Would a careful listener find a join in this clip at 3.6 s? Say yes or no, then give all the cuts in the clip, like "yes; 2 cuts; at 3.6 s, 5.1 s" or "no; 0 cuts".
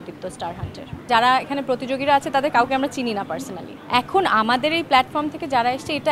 yes; 2 cuts; at 1.1 s, 3.6 s